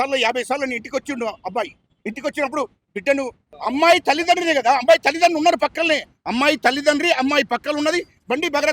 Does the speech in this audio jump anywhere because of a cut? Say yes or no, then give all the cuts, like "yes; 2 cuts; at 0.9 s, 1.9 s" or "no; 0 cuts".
yes; 1 cut; at 3.5 s